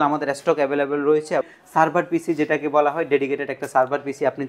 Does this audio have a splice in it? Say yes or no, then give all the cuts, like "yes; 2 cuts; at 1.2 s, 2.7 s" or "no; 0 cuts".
yes; 1 cut; at 1.5 s